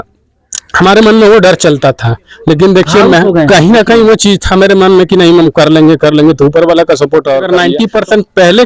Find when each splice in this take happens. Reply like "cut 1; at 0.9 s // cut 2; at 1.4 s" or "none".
cut 1; at 7.5 s